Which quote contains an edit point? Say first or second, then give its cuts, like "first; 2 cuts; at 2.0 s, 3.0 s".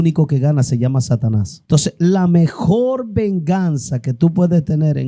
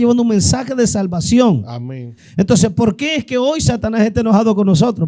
first; 1 cut; at 1.5 s